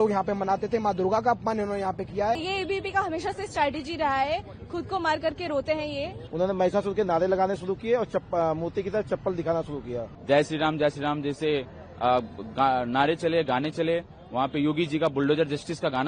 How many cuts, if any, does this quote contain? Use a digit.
3